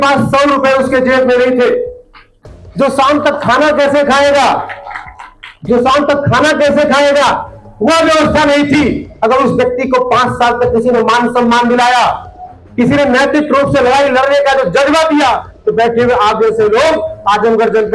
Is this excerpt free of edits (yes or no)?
yes